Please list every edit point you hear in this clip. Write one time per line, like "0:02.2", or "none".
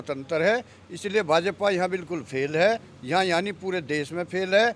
none